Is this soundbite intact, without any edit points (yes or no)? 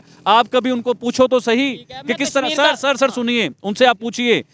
yes